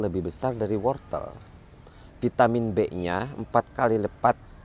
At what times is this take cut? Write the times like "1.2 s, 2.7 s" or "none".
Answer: none